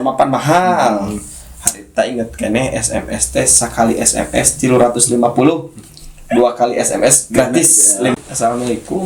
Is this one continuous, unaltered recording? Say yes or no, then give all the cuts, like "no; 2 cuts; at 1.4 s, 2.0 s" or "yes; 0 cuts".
no; 1 cut; at 8.1 s